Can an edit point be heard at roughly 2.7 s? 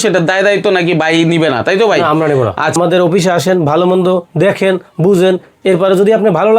yes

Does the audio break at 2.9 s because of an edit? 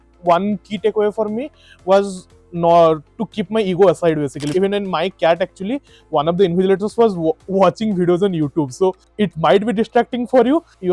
no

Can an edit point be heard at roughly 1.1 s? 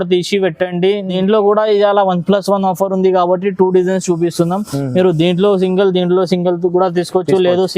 yes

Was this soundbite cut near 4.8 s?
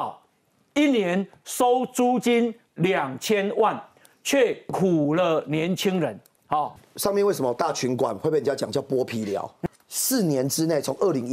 no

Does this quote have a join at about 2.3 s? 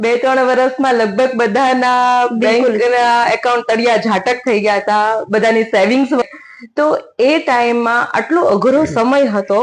no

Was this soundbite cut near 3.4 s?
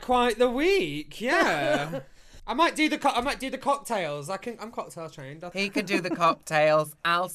no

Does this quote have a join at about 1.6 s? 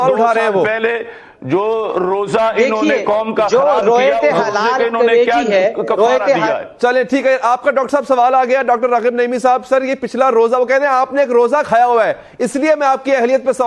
no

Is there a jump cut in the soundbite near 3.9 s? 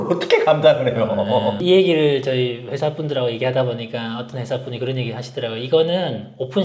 no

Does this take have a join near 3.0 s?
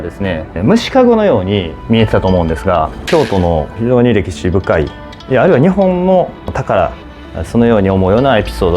yes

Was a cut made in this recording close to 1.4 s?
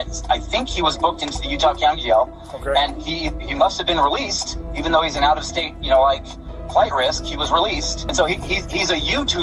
no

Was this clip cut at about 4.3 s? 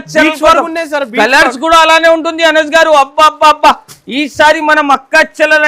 no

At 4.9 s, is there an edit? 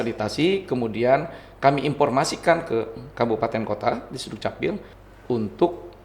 yes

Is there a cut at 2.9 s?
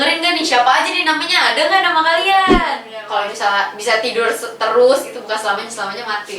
yes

